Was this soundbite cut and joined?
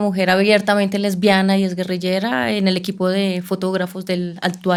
no; 0 cuts

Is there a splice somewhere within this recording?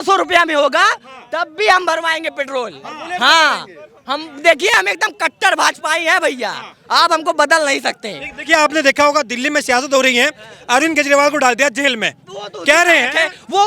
no; 0 cuts

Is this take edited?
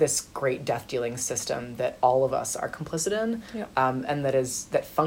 no; 0 cuts

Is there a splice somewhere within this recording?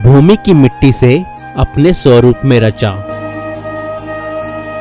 no; 0 cuts

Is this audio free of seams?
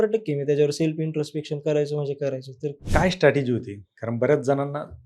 no; 1 cut; at 2.8 s

